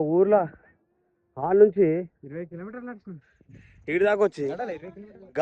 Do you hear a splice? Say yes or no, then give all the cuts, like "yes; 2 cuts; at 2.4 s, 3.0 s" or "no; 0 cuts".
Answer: no; 0 cuts